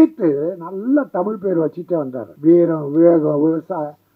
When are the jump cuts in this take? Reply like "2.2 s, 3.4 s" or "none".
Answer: 2.2 s